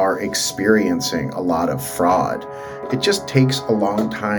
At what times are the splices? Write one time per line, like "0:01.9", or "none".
0:02.9